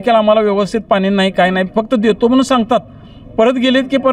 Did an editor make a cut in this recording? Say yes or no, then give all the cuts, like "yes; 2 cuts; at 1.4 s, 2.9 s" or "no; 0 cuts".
no; 0 cuts